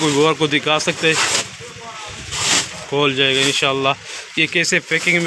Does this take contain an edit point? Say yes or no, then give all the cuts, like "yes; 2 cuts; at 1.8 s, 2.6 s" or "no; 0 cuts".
no; 0 cuts